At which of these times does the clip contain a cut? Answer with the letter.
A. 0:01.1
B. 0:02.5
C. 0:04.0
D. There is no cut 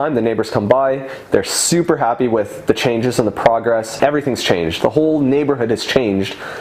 C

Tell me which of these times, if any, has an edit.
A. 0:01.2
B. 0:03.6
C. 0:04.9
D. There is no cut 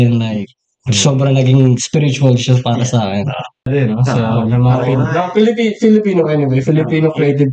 B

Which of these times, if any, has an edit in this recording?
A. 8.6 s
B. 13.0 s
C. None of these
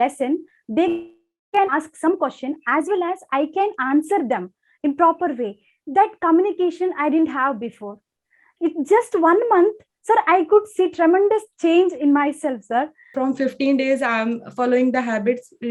B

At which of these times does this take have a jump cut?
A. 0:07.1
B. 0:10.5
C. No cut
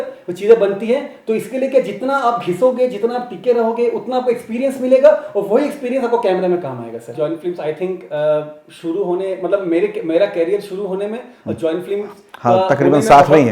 A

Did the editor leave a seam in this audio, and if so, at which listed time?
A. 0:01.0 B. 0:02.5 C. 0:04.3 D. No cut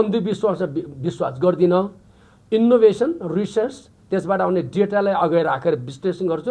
D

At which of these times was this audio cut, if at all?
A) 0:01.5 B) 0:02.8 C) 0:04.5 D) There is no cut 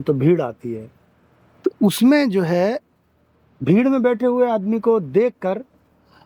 D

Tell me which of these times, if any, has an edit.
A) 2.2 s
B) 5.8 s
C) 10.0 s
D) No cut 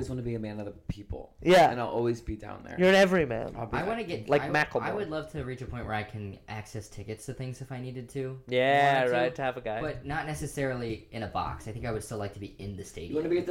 D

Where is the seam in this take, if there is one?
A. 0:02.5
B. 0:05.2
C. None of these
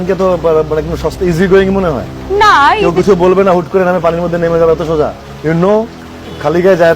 B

